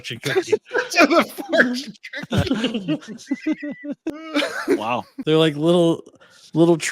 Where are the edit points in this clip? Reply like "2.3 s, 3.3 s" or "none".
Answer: 4.2 s, 5.1 s